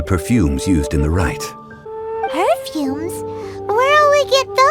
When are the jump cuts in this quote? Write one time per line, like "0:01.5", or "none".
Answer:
none